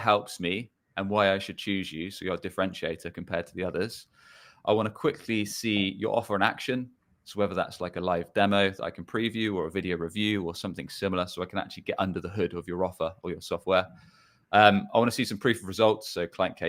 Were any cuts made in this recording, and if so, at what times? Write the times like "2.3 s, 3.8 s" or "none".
none

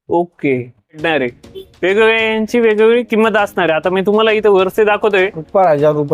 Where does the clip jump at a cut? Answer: 1.0 s

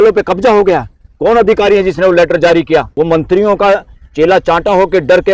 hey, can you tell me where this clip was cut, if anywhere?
2.9 s

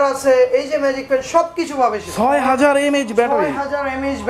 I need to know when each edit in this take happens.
2.0 s

